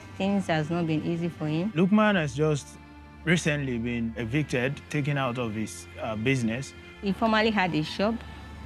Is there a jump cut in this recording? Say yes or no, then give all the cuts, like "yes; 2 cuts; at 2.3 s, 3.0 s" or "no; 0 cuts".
yes; 3 cuts; at 1.7 s, 4.1 s, 7.0 s